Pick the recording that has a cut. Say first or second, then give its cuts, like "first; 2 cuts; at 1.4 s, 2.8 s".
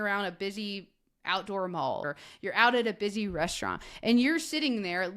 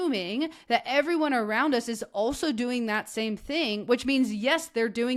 first; 1 cut; at 2.0 s